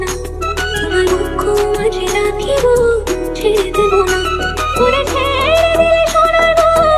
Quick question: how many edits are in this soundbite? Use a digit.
0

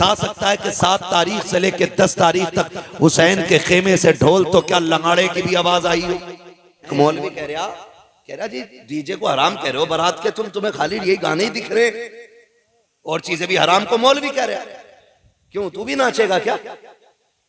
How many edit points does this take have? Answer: 1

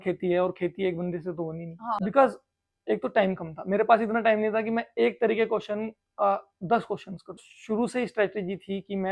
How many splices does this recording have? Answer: 2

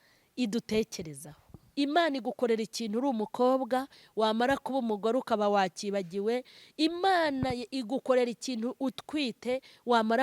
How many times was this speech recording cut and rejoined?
1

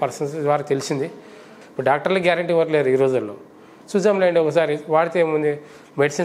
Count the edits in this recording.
1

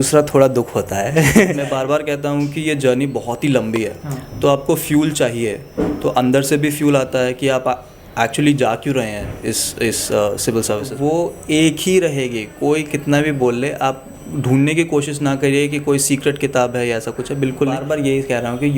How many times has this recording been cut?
3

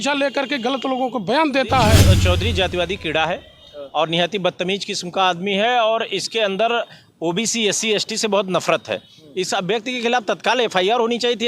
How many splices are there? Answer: 1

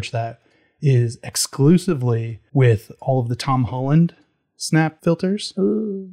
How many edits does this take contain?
2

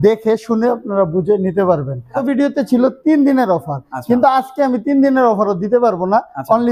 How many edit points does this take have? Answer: 1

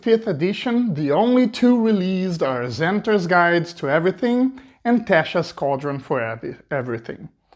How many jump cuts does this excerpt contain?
0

